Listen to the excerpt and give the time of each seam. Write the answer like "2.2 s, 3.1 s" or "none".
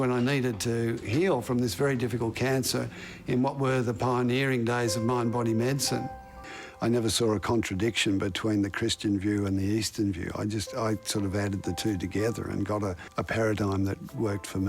6.5 s, 13.0 s